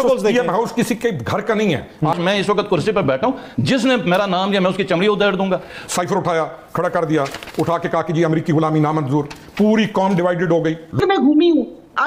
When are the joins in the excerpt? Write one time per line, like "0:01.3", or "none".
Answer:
0:02.2
0:05.8
0:11.0